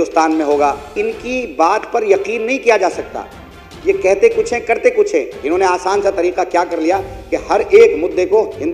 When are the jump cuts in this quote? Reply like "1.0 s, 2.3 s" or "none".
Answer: 0.9 s, 5.3 s